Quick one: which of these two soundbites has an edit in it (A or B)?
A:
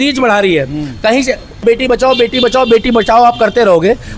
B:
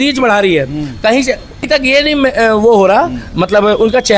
A